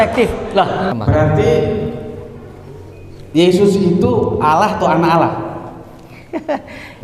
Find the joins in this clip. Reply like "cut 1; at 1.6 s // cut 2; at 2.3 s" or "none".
cut 1; at 0.9 s